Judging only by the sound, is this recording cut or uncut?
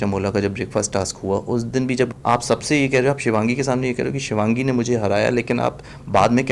cut